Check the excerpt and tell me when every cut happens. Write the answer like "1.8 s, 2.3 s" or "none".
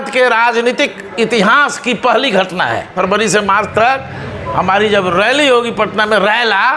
2.9 s